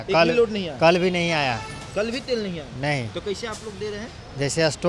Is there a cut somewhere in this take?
no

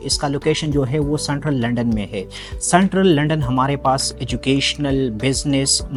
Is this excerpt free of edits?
yes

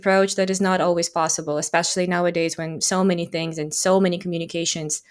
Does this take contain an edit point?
no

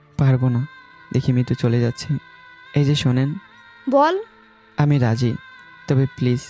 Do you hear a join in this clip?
yes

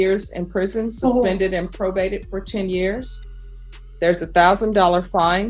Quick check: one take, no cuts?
yes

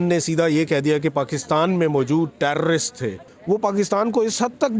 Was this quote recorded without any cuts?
no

